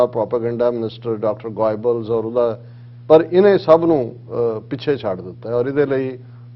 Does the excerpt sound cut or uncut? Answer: uncut